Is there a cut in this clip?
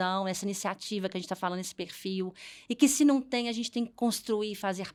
no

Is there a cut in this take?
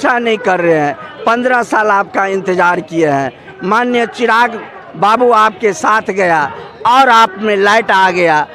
no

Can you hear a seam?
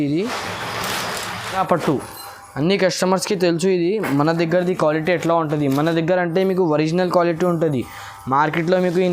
yes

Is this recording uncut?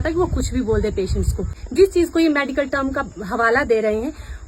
no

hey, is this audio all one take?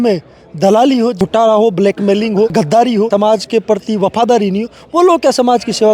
no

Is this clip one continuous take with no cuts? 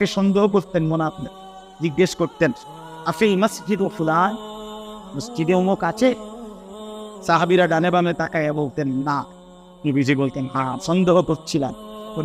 yes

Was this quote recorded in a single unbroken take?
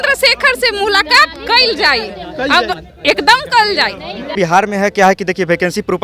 no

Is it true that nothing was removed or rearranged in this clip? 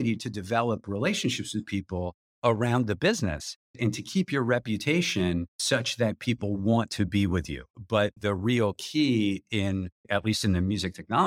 no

